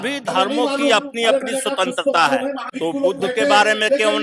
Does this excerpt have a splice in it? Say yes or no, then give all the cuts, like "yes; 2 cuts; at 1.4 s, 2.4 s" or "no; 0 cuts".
yes; 1 cut; at 2.7 s